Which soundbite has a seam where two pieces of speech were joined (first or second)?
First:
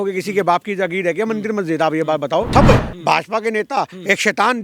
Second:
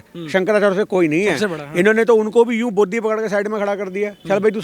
first